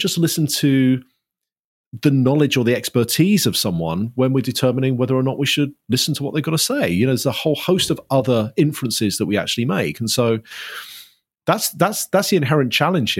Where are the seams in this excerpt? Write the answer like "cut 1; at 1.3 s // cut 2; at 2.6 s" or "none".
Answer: none